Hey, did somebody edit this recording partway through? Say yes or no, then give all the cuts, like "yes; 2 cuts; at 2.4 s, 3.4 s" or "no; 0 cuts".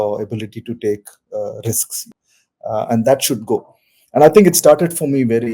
yes; 1 cut; at 2.0 s